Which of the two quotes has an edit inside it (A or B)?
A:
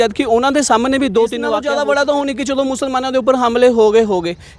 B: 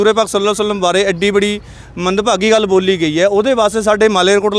A